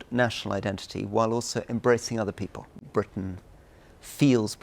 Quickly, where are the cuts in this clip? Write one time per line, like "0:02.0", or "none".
0:02.9